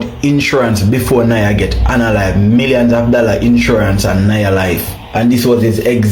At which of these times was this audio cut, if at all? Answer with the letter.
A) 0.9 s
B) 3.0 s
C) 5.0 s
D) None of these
C